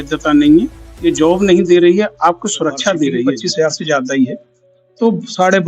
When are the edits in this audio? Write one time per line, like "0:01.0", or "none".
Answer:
0:03.4